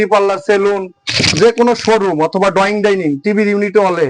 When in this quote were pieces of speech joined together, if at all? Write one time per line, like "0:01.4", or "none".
none